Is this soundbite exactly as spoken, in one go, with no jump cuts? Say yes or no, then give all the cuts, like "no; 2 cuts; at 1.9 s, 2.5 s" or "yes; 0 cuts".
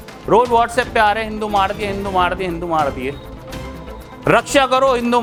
yes; 0 cuts